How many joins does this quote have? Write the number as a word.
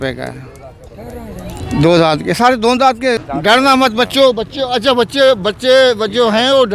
one